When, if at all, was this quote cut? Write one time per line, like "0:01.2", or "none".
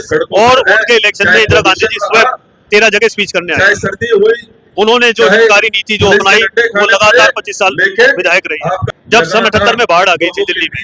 0:08.9